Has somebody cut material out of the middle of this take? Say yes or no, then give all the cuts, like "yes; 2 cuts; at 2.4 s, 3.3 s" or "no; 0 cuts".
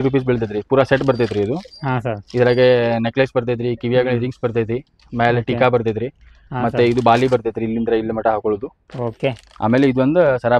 no; 0 cuts